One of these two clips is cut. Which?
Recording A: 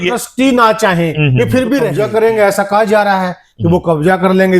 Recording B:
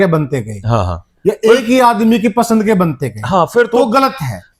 A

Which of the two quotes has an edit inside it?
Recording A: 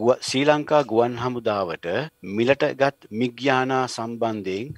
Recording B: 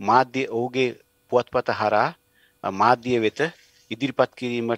A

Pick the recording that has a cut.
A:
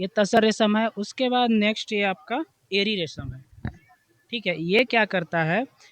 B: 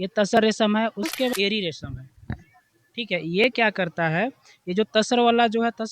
B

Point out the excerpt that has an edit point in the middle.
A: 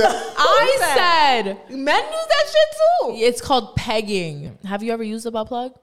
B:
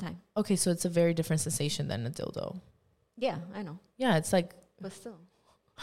A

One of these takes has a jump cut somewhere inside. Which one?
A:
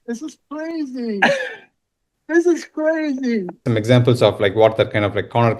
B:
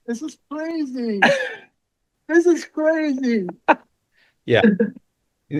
A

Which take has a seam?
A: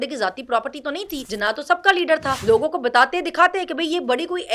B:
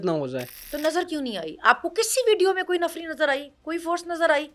A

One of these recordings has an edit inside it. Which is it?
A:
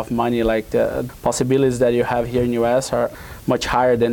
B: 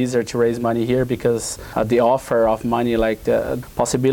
B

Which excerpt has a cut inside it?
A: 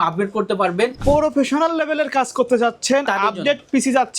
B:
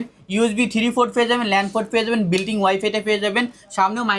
A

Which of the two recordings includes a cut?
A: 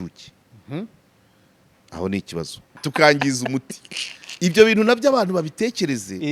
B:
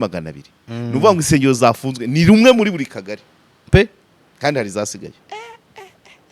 A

